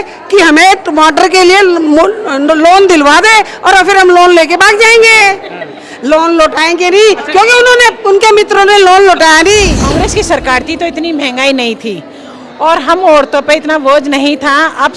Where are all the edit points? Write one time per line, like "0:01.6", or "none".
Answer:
0:09.9

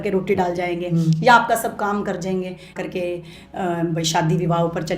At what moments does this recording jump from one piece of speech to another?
0:02.7

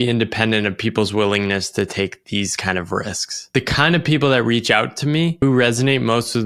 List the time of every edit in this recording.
0:03.5
0:05.4

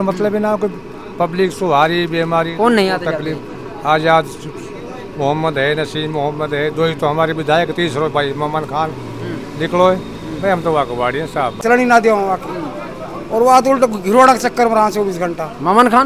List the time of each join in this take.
0:11.6

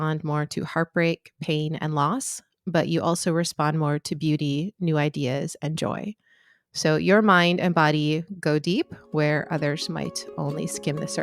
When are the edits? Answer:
none

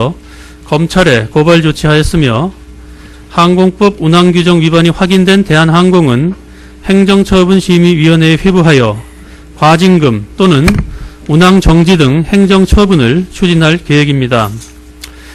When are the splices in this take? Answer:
0:13.2

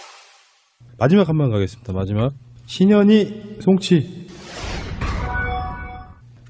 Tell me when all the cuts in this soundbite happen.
0:02.2

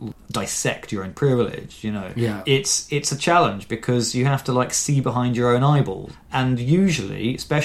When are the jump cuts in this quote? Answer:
0:02.4
0:06.2

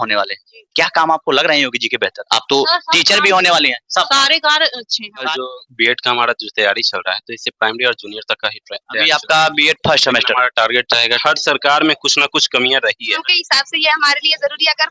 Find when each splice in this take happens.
0:05.3
0:11.2
0:13.3

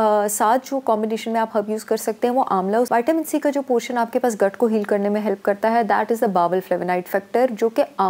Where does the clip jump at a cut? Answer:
0:02.9

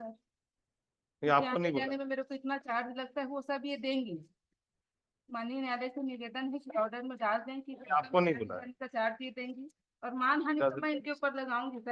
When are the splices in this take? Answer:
none

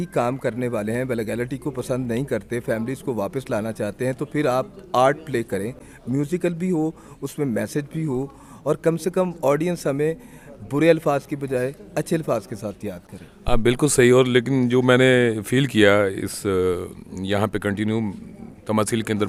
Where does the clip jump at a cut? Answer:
none

